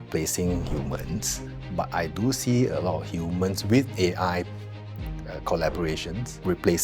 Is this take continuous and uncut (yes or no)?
yes